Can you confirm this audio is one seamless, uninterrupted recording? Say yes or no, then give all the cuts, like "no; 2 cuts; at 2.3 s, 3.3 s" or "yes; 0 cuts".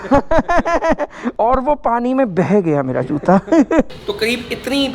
no; 1 cut; at 3.9 s